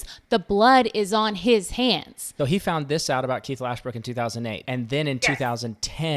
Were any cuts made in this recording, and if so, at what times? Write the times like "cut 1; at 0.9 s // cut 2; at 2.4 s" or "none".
cut 1; at 2.2 s // cut 2; at 4.6 s